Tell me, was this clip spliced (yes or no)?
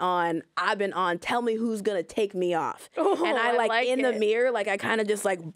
no